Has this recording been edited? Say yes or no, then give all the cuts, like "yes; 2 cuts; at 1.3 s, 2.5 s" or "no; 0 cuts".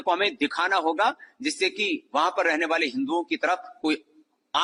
no; 0 cuts